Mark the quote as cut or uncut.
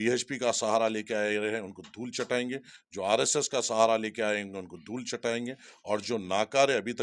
uncut